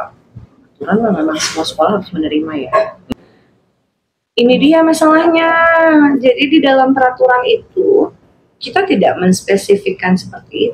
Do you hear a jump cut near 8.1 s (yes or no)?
no